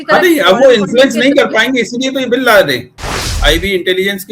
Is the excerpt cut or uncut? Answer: cut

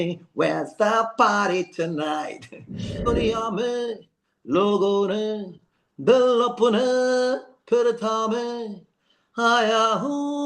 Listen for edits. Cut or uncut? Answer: cut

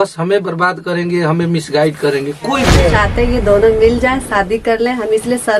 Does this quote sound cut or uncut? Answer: cut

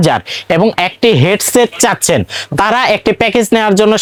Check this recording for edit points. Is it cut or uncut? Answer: uncut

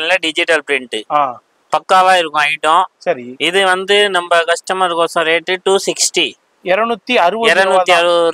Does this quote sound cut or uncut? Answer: uncut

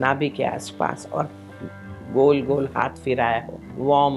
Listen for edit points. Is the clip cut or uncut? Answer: uncut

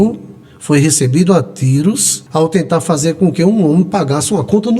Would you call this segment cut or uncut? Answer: cut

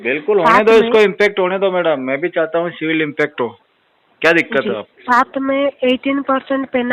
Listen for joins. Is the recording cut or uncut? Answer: uncut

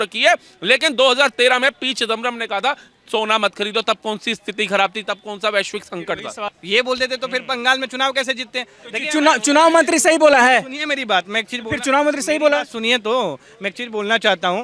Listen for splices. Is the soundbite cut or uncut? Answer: cut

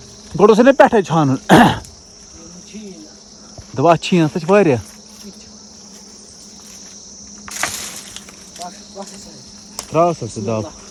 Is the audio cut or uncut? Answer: uncut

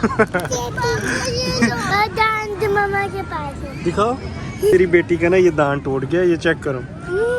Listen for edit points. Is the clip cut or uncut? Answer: cut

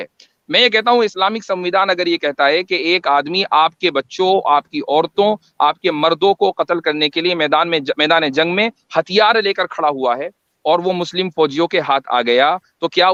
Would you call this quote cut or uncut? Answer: uncut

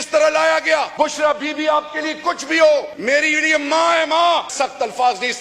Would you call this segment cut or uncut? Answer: cut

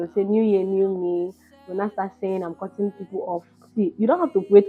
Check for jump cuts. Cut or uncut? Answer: uncut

